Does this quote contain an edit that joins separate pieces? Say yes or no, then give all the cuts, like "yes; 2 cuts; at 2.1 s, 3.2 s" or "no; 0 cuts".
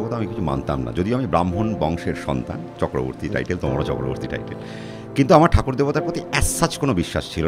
no; 0 cuts